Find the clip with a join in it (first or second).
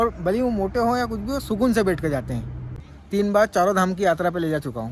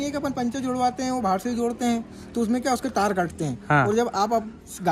first